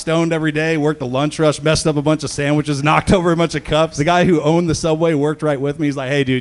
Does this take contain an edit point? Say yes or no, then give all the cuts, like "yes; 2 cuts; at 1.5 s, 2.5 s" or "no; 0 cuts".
yes; 1 cut; at 3.9 s